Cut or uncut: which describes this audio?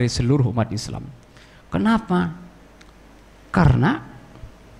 uncut